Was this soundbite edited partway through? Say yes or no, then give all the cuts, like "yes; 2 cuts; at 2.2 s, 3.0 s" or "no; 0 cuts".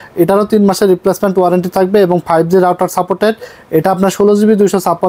no; 0 cuts